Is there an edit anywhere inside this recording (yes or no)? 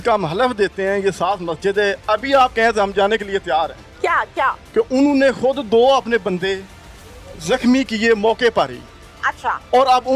no